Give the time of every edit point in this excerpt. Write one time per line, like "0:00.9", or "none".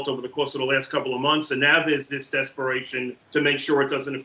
0:03.2